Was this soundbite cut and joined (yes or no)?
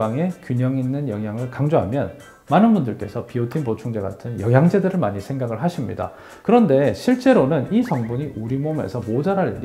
no